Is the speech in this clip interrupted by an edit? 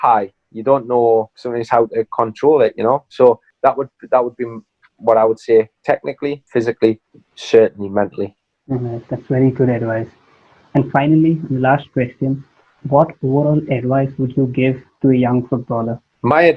no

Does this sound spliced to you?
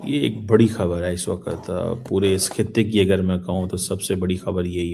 no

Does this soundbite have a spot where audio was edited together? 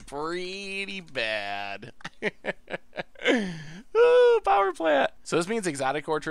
yes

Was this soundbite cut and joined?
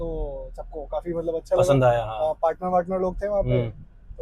no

